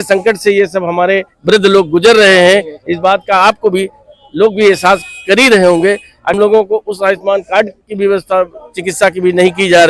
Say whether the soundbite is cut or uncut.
cut